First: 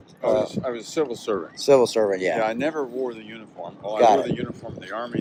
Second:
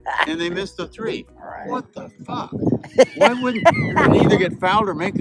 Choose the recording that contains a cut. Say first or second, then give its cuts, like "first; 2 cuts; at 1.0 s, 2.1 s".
second; 1 cut; at 4.0 s